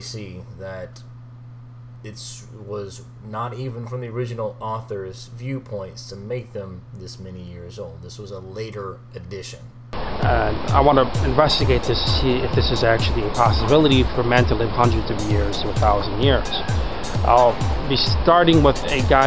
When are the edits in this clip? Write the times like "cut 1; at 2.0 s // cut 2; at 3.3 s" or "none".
cut 1; at 2.8 s